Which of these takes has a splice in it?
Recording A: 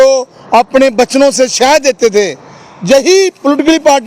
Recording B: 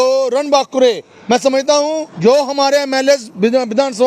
B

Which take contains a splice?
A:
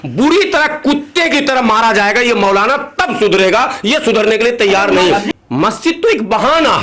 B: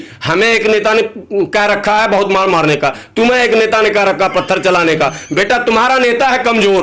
A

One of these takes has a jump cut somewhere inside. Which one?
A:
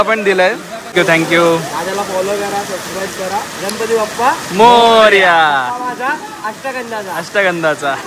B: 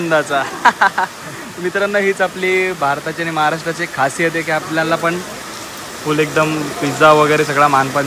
A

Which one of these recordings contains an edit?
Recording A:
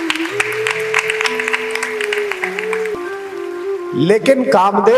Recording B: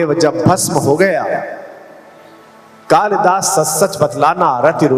A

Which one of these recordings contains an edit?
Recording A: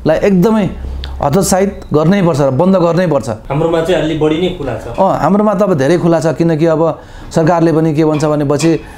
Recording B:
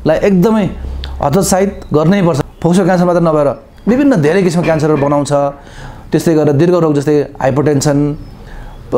B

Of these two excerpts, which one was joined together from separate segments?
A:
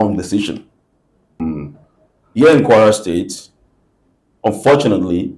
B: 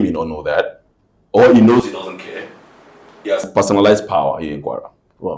A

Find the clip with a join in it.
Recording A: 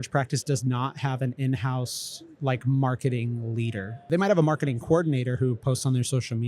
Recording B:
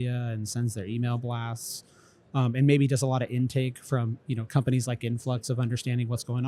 A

